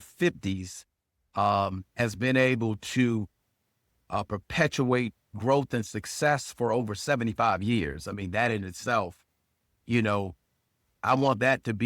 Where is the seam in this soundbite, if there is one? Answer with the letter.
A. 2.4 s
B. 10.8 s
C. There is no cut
B